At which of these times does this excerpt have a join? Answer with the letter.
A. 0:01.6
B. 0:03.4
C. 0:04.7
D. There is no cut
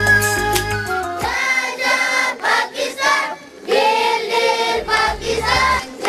D